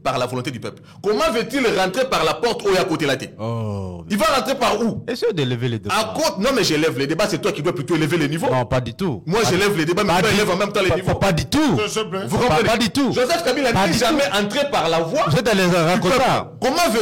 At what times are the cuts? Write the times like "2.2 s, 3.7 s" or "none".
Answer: none